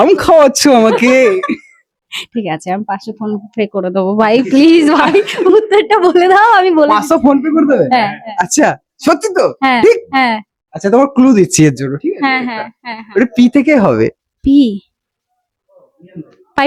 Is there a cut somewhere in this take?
no; 0 cuts

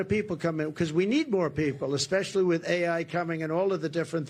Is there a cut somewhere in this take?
no; 0 cuts

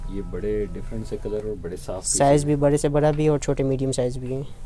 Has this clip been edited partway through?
no; 0 cuts

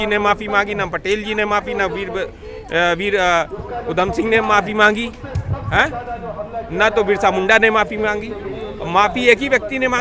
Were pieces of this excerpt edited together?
no; 0 cuts

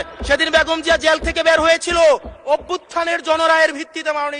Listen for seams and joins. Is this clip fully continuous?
yes; 0 cuts

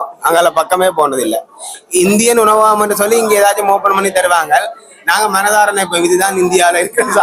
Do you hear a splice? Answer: no; 0 cuts

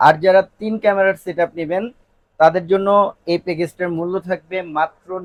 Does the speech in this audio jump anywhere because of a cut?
no; 0 cuts

